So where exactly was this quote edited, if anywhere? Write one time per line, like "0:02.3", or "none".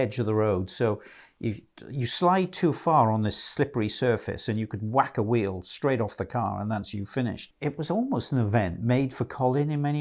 0:07.5